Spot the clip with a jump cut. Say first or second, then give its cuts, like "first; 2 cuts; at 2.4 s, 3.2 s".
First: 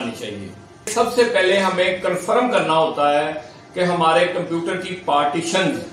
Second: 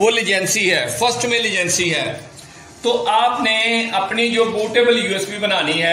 first; 1 cut; at 0.9 s